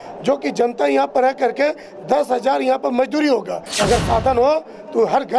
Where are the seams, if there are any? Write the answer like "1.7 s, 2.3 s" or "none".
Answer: 3.7 s